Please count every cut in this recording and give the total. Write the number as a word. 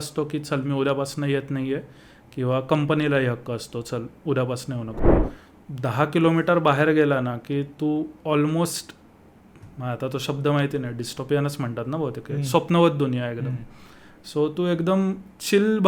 one